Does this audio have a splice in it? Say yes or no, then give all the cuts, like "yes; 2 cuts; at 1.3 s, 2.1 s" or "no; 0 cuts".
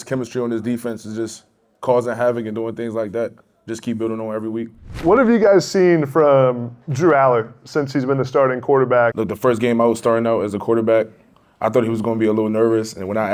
yes; 2 cuts; at 4.9 s, 9.1 s